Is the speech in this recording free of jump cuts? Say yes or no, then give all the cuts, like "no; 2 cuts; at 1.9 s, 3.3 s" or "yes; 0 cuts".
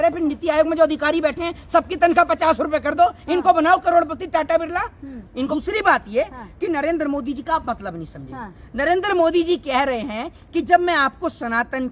no; 1 cut; at 5.5 s